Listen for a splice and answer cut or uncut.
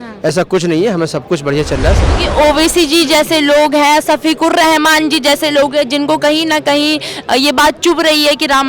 cut